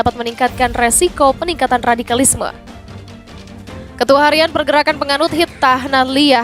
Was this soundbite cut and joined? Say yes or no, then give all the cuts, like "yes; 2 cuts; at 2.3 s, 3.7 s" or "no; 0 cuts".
yes; 2 cuts; at 2.5 s, 4.0 s